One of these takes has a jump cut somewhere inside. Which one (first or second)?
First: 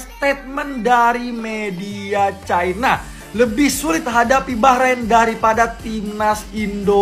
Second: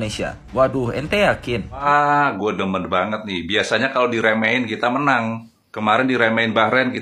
second